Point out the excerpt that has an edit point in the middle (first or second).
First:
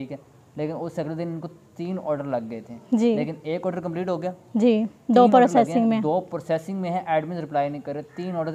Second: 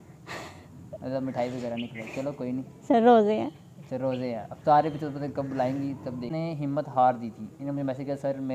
second